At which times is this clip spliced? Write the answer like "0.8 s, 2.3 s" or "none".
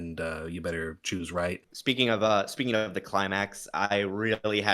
1.5 s